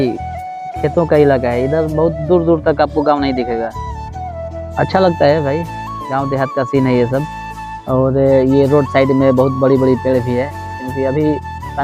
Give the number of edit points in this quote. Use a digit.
0